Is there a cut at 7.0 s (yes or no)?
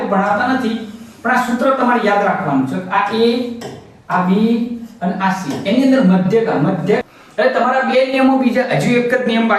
yes